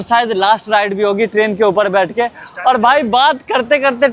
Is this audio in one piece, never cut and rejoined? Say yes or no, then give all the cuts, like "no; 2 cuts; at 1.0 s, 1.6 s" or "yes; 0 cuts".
yes; 0 cuts